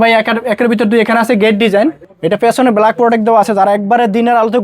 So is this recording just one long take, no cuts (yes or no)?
no